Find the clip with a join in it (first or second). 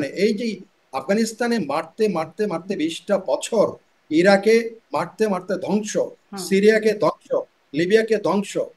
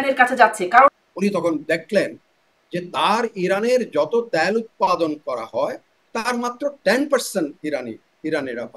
second